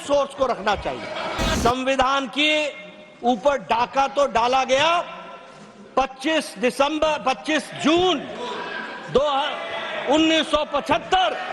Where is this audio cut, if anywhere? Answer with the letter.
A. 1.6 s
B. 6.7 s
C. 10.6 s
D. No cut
A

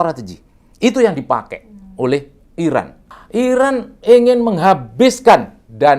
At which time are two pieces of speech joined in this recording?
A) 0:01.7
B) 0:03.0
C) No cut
B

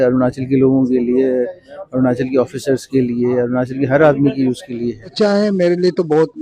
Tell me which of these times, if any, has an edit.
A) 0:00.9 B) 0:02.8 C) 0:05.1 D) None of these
C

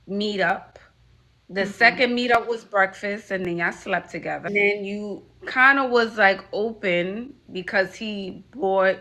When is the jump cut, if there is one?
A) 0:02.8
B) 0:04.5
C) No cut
B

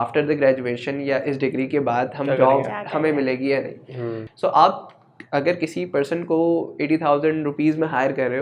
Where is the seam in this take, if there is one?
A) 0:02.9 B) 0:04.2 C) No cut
B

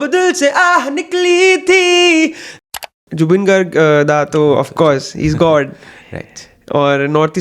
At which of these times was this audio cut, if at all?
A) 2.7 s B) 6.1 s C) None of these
A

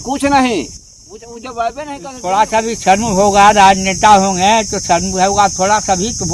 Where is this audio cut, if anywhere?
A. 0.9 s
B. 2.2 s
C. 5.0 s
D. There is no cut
B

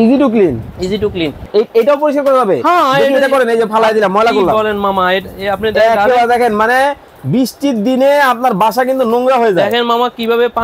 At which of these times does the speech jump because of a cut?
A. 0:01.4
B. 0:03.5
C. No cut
A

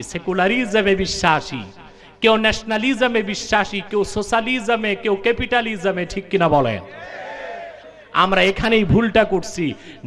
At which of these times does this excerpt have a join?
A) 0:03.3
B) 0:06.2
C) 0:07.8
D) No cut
C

